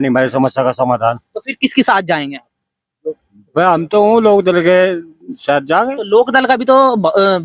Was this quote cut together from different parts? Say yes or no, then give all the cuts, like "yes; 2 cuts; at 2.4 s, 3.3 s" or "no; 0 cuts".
no; 0 cuts